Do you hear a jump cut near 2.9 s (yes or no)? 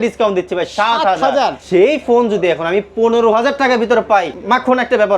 no